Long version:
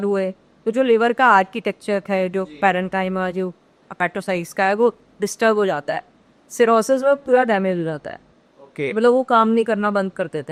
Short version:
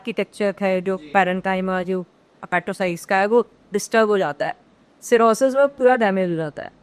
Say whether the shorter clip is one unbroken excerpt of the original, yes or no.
yes